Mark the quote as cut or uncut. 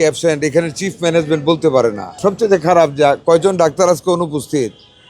cut